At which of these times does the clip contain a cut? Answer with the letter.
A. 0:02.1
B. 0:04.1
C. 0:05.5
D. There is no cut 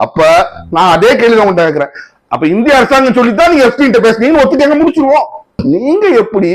C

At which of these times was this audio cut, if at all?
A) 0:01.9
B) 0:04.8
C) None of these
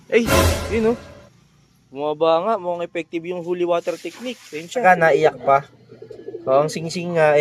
B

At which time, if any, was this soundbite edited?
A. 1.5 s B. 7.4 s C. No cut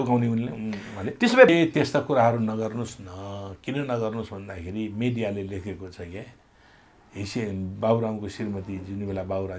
A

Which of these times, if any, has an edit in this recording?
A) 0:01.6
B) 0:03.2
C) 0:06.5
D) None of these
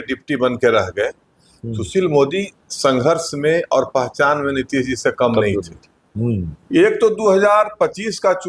C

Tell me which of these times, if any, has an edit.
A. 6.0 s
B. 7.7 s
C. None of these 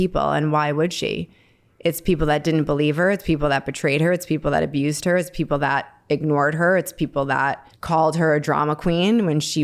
B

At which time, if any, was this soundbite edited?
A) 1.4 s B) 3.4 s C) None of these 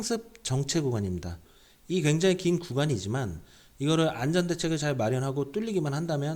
A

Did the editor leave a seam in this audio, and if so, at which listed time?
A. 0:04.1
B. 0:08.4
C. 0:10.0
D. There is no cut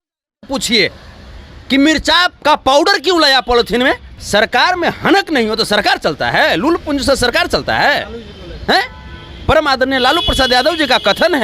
A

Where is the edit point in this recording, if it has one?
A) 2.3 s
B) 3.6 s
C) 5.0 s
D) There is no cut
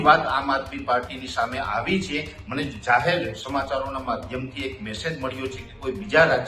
D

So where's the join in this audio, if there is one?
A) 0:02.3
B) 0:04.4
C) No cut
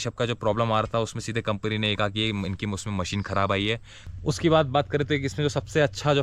B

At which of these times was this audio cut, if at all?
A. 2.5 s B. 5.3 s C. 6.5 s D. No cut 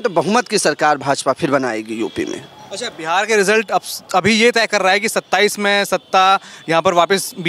D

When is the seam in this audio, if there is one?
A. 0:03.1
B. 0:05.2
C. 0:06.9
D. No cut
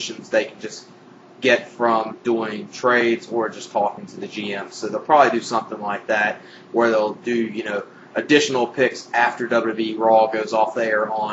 C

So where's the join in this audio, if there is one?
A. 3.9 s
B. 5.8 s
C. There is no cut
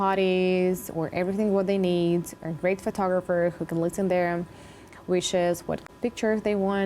B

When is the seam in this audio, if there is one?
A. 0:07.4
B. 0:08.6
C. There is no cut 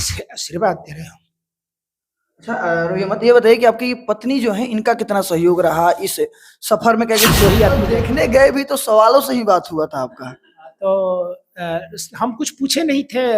A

